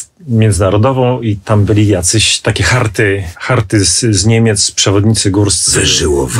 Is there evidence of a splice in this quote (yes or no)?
yes